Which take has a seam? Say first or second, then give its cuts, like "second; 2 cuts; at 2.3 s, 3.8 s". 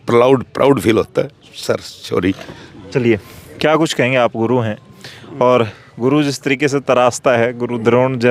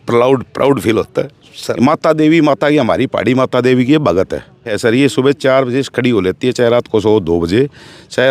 second; 2 cuts; at 1.6 s, 4.7 s